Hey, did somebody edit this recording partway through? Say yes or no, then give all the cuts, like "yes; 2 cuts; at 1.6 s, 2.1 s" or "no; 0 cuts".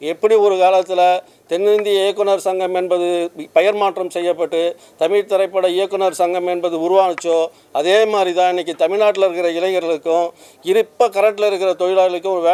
no; 0 cuts